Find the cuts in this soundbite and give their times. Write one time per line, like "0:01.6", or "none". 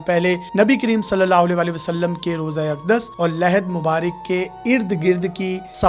none